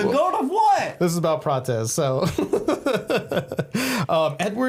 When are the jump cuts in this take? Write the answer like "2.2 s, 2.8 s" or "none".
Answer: none